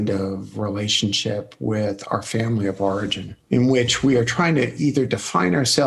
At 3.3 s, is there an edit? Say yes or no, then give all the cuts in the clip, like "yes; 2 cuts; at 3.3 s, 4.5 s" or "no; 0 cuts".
yes; 1 cut; at 3.3 s